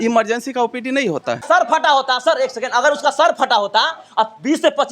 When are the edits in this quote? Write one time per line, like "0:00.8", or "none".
0:01.4